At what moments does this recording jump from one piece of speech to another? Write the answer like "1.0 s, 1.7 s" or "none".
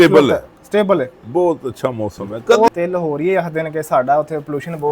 2.7 s